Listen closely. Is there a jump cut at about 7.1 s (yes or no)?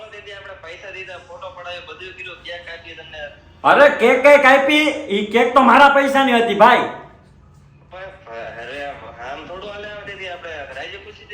yes